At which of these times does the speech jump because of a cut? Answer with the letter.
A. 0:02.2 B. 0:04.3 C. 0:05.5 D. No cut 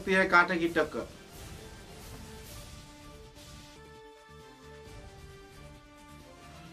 D